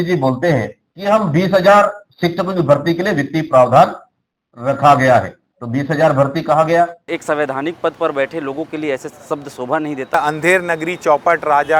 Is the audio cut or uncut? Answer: cut